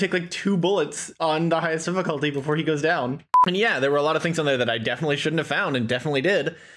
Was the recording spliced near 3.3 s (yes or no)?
yes